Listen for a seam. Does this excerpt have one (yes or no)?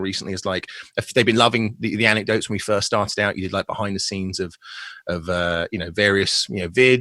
no